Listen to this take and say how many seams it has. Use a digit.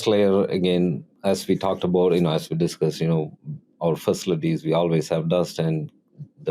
1